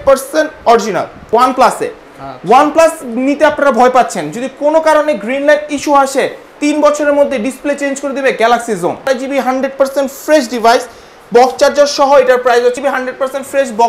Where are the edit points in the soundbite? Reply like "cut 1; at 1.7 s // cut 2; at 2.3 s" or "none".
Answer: cut 1; at 1.2 s // cut 2; at 9.0 s // cut 3; at 12.7 s